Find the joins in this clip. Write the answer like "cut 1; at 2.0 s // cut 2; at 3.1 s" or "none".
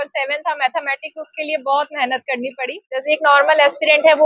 cut 1; at 3.0 s